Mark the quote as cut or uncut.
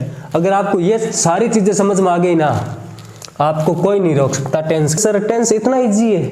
cut